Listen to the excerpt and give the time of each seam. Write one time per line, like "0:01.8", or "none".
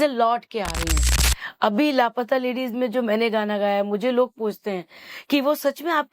0:01.0